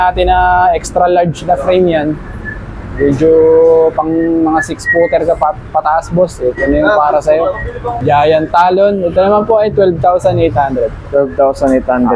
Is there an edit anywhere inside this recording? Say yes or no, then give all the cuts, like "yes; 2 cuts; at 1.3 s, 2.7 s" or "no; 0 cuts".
no; 0 cuts